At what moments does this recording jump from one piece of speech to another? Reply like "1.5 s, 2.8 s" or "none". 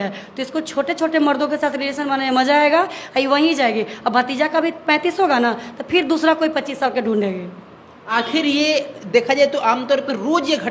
none